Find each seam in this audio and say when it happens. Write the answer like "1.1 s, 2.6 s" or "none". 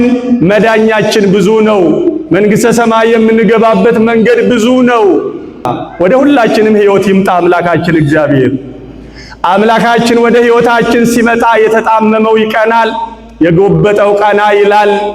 5.8 s